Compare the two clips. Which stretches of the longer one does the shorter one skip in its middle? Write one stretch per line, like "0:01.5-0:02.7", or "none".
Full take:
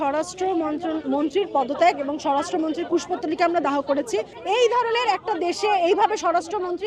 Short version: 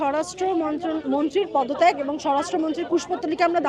none